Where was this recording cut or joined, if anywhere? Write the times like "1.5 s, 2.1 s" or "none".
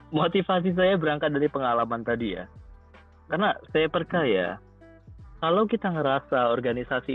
none